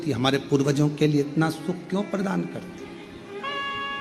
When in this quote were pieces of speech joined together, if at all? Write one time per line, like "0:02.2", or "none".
0:02.7